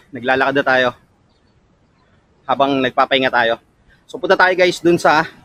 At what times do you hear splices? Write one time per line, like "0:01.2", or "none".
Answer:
none